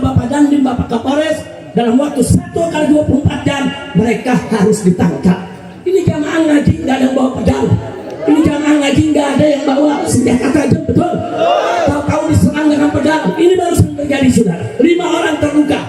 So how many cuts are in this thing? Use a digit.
1